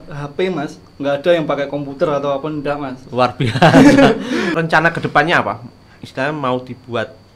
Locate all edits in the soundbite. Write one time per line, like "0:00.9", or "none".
0:04.5